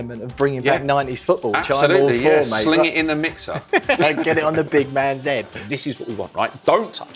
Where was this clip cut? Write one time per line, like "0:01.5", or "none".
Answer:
0:05.6